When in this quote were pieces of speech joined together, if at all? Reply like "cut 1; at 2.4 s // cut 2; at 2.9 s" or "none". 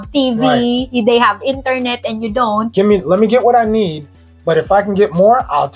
cut 1; at 2.7 s